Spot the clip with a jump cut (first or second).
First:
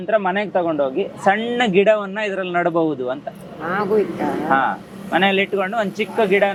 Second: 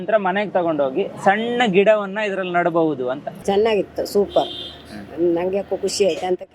second